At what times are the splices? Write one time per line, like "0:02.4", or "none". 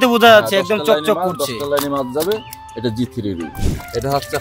0:03.5